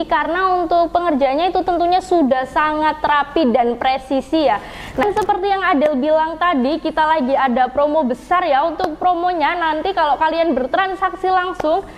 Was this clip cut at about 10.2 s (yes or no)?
no